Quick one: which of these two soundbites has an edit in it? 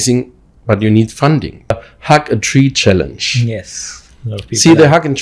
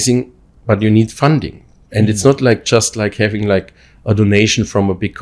first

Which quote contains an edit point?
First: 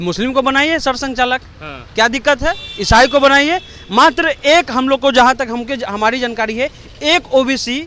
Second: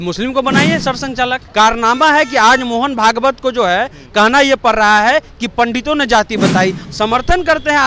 second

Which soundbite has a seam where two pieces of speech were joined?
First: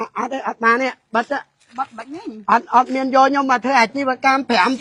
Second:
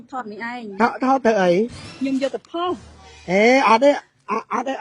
second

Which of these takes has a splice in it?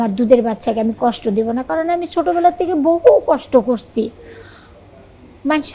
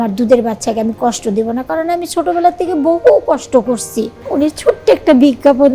second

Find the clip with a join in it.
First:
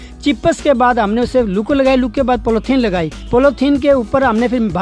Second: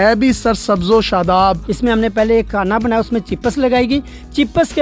second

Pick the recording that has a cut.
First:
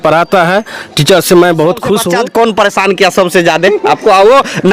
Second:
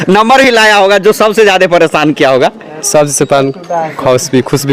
first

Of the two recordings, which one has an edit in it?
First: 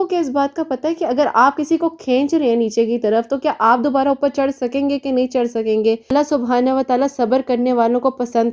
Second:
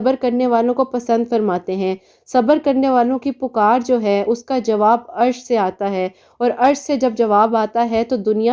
first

